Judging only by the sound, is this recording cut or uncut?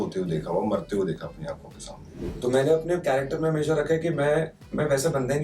cut